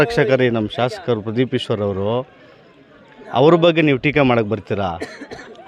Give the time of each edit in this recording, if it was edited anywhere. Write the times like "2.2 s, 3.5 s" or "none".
none

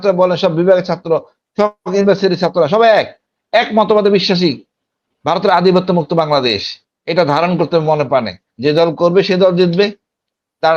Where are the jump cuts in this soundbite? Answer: none

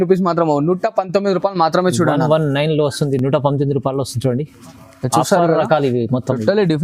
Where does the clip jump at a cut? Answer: none

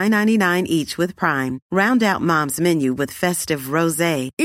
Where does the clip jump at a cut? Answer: none

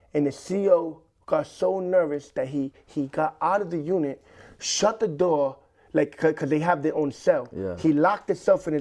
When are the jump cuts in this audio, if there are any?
none

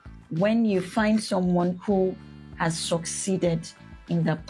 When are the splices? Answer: none

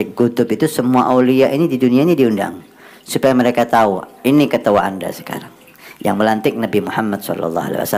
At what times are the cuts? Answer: none

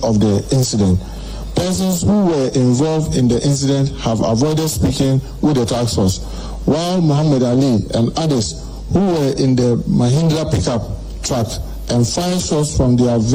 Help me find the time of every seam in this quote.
none

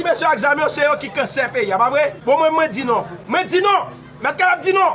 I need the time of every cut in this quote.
2.2 s, 3.2 s

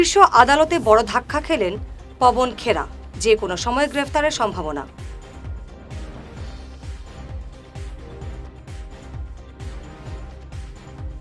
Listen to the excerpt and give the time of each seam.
none

